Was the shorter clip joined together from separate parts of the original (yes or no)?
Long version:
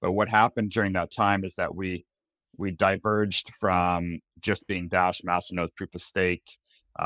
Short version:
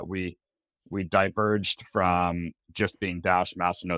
no